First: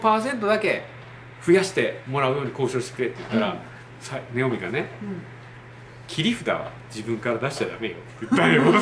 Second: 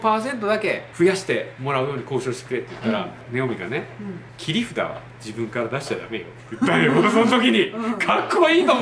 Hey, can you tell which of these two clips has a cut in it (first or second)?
second